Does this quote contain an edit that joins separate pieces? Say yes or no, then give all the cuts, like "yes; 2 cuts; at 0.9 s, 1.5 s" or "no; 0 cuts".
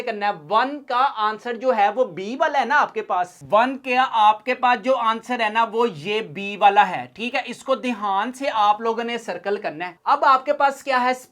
yes; 2 cuts; at 3.4 s, 9.9 s